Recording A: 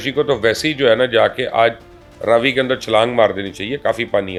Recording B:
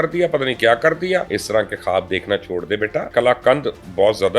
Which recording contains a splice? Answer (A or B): B